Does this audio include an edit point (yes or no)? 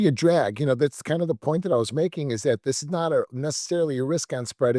yes